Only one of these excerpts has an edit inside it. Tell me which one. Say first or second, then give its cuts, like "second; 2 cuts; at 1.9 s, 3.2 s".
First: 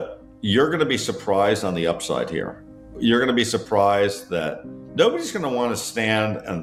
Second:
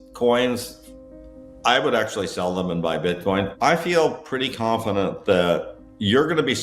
second; 1 cut; at 3.5 s